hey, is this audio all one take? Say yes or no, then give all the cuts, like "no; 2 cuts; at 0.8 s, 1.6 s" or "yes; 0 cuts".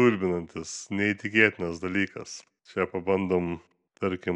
yes; 0 cuts